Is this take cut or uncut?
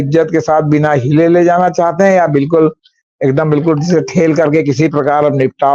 uncut